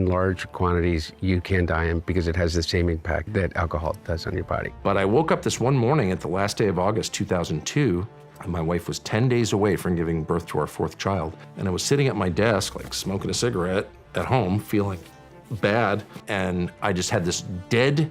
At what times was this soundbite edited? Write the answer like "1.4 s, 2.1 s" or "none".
4.7 s